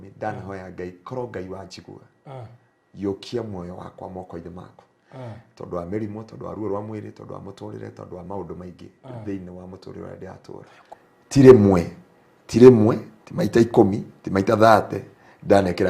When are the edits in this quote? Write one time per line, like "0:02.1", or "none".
0:10.9